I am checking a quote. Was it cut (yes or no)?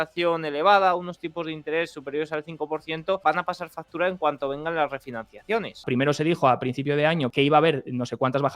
yes